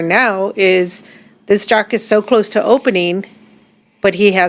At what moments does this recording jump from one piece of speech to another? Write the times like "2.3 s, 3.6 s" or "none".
none